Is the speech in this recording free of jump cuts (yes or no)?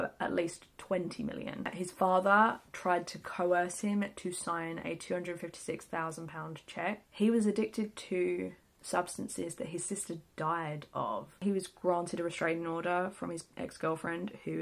no